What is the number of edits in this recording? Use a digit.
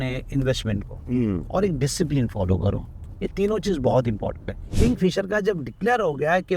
1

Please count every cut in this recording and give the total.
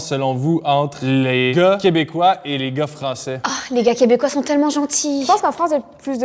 2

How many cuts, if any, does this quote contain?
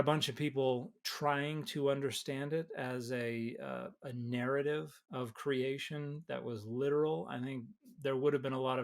1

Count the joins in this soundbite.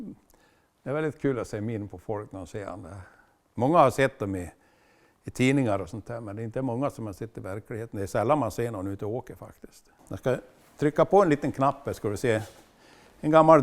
1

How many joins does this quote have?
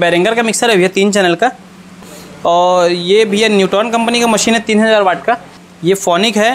2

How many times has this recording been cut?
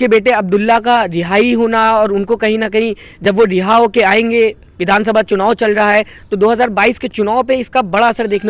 0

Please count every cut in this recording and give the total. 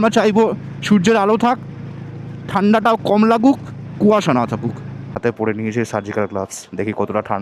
1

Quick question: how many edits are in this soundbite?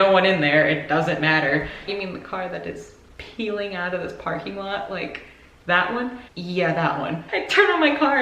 3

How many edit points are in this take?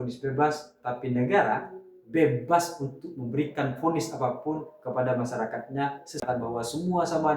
1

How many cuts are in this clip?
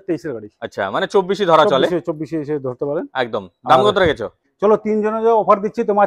1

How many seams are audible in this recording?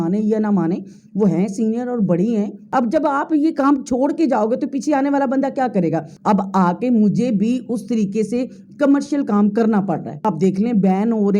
3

